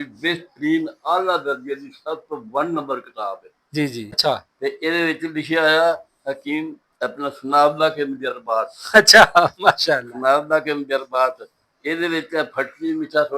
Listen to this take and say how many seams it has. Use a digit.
1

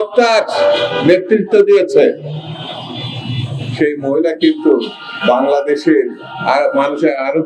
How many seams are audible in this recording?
0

